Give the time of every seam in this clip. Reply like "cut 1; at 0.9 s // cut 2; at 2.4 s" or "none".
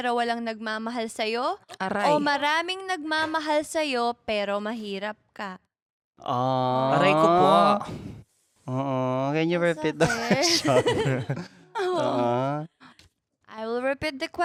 none